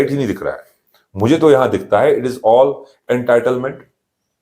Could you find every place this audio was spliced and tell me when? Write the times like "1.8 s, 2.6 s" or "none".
none